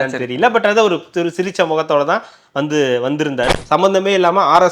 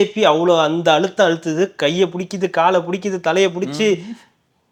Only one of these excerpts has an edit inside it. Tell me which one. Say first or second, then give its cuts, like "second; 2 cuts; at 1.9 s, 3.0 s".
first; 1 cut; at 3.5 s